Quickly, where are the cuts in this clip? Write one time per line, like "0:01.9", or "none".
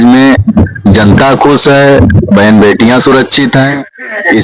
none